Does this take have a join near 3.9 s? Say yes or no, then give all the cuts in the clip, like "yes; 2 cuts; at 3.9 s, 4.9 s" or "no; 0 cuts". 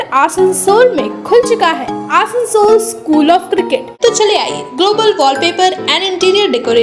yes; 1 cut; at 3.9 s